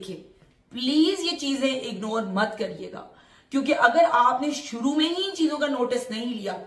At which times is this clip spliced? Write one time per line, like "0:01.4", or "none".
none